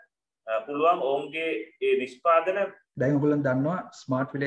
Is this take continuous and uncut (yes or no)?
no